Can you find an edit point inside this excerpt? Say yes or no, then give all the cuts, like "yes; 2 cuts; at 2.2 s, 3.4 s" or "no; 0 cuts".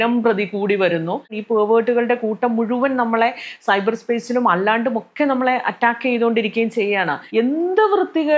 yes; 2 cuts; at 1.4 s, 7.2 s